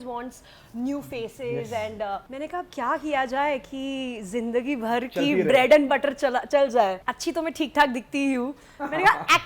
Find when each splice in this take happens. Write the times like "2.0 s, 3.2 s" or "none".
2.3 s, 7.1 s